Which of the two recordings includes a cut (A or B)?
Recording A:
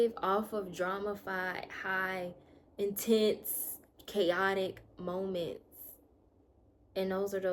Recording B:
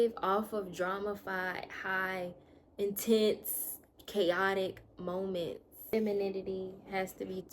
B